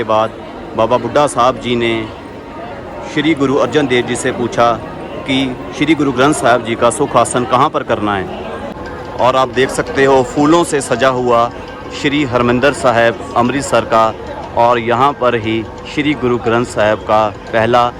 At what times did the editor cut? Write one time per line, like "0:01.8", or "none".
0:08.7